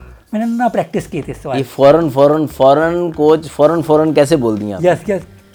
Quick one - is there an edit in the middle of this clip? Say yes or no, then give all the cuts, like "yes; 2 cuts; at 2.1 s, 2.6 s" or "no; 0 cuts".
no; 0 cuts